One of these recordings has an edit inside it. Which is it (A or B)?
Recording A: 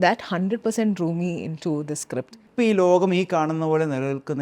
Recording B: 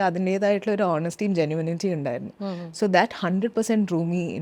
A